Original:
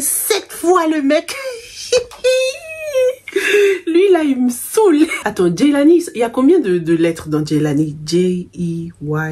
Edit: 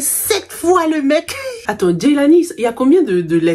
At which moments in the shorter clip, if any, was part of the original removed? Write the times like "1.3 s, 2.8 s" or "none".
1.6 s